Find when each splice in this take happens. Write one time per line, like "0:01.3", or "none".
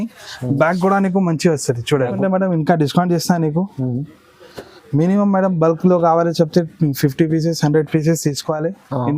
0:02.2